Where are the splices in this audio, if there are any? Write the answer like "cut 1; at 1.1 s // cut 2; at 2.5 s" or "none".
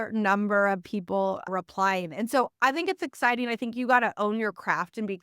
cut 1; at 1.5 s